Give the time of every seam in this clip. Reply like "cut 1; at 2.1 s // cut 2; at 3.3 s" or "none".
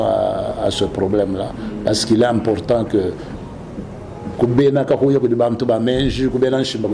none